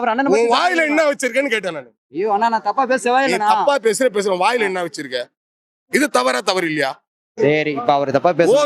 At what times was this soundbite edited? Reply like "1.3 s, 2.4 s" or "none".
7.4 s

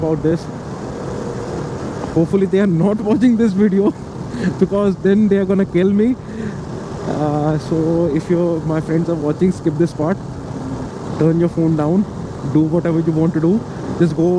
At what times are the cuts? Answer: none

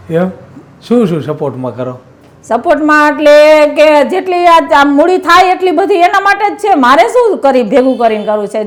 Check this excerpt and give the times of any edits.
none

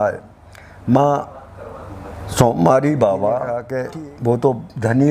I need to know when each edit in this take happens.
3.7 s

